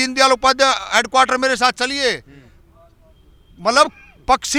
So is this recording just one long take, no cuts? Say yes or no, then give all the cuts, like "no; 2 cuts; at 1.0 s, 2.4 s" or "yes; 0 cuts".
yes; 0 cuts